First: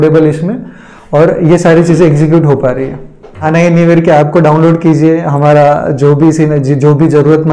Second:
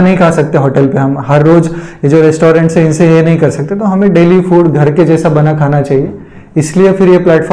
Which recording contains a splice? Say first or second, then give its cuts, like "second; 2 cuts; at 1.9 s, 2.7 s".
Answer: first; 1 cut; at 3.4 s